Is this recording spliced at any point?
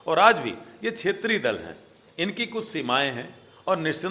no; 0 cuts

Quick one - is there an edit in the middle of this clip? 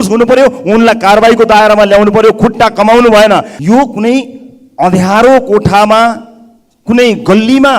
yes; 1 cut; at 3.5 s

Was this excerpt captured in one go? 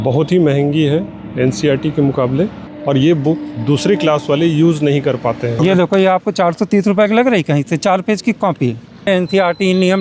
no; 3 cuts; at 2.7 s, 5.5 s, 9.0 s

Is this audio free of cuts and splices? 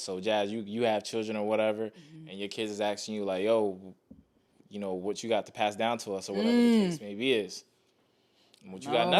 yes; 0 cuts

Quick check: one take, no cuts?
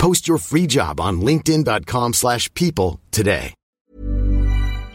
no; 1 cut; at 3.9 s

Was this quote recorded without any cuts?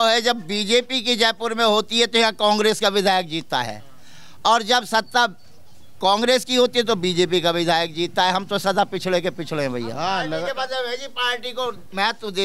no; 1 cut; at 10.0 s

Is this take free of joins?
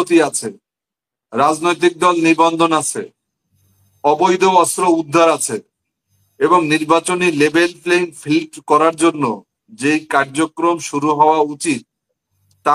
yes; 0 cuts

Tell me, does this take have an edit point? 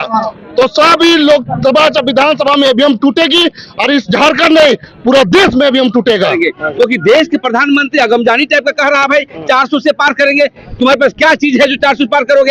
yes; 1 cut; at 6.3 s

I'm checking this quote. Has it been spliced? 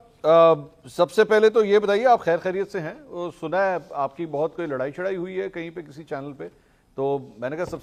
no; 0 cuts

